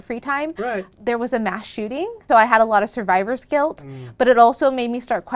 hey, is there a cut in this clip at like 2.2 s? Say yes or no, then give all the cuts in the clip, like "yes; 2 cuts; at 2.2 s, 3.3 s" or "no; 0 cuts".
yes; 1 cut; at 2.2 s